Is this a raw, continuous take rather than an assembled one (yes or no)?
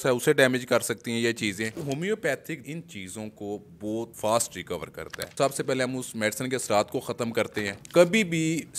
no